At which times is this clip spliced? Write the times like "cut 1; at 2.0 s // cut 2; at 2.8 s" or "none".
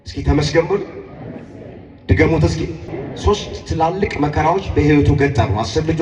cut 1; at 3.0 s